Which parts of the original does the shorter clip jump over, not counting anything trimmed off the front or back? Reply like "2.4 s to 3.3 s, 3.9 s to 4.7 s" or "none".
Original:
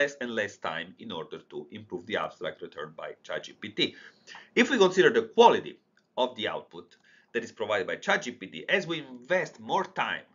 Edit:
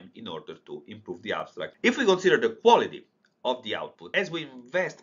2.6 s to 4.5 s, 6.7 s to 8.6 s